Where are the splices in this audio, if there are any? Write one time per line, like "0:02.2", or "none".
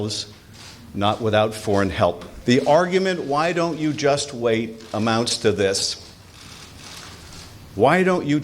0:02.3